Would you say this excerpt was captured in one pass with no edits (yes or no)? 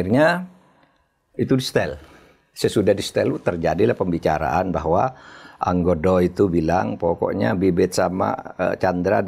yes